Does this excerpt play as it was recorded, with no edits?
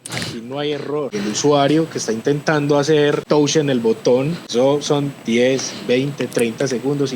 no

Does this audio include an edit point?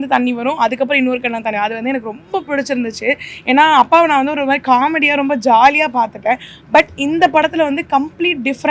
no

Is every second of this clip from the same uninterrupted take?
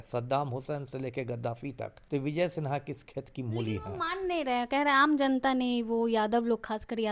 no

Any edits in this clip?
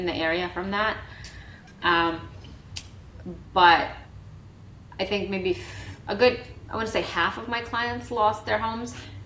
no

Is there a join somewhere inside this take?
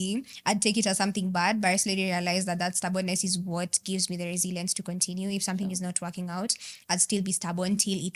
no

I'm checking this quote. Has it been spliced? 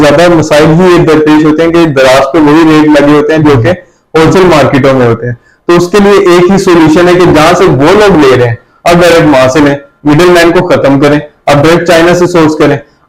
no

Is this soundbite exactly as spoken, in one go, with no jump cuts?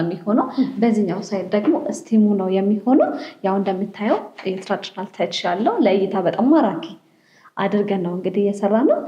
yes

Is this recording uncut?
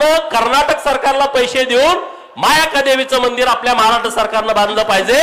yes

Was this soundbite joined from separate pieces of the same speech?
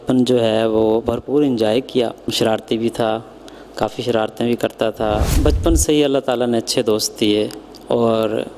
yes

